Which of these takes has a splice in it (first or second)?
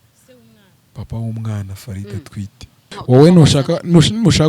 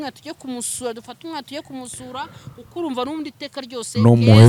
first